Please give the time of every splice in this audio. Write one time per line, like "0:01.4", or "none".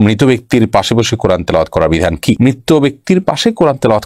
none